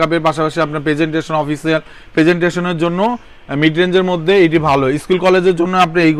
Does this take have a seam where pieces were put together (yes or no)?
no